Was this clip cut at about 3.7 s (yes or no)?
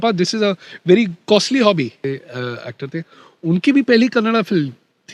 no